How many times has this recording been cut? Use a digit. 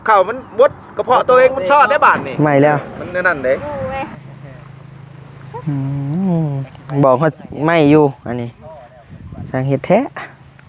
3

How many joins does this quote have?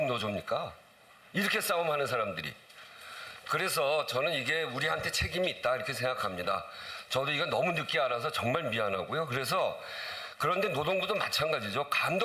0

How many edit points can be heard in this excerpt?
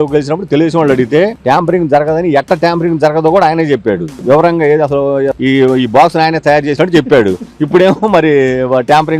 2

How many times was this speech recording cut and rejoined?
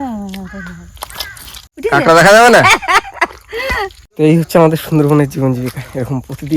2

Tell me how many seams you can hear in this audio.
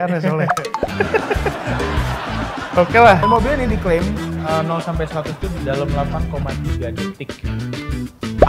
1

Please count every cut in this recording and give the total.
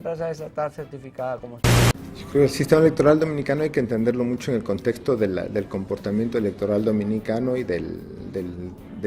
1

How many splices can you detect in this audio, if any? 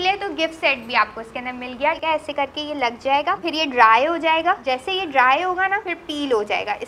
4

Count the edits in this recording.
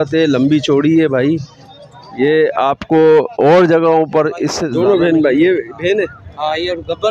1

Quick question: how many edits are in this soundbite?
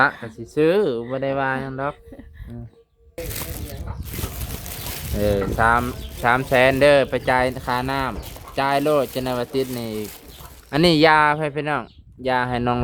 1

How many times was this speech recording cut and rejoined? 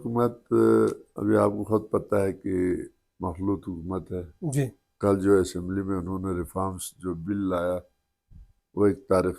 2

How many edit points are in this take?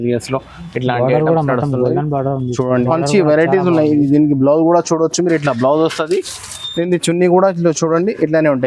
1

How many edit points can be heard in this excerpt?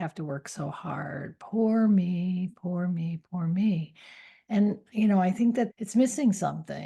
1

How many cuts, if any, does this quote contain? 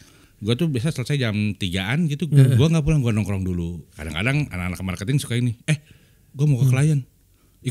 1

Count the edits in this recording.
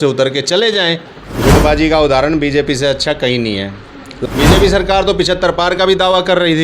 2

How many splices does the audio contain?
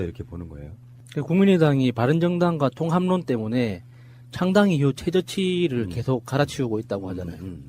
1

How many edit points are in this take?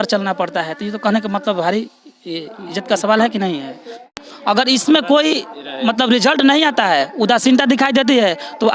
1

